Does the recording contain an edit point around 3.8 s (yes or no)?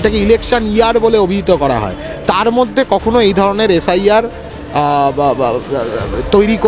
no